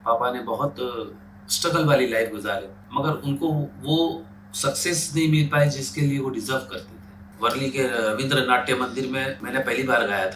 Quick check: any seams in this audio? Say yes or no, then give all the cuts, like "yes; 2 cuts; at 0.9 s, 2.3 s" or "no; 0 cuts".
yes; 3 cuts; at 2.8 s, 7.3 s, 9.4 s